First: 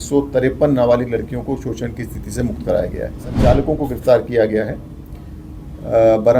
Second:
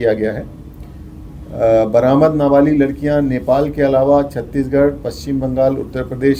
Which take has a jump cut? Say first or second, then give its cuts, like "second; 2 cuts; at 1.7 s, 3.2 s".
first; 1 cut; at 3.2 s